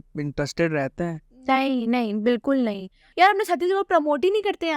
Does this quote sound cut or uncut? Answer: cut